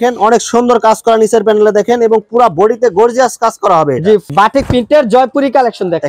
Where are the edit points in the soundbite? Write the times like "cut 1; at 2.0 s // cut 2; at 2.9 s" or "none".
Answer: cut 1; at 4.3 s